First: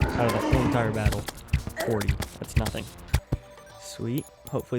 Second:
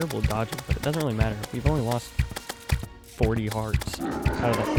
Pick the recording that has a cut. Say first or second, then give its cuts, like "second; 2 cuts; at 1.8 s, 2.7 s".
first; 1 cut; at 3.2 s